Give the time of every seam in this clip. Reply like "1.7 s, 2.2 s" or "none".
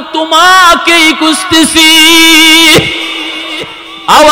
none